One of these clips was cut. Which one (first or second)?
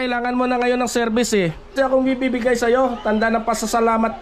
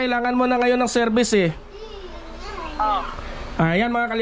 first